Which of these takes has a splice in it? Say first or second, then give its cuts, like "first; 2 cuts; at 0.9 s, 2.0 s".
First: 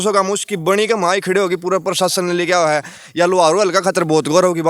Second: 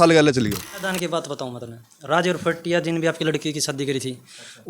second; 1 cut; at 0.9 s